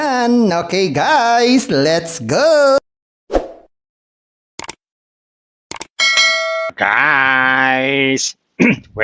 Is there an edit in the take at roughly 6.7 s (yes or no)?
yes